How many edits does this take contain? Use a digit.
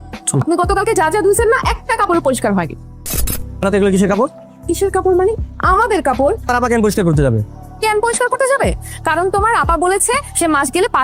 0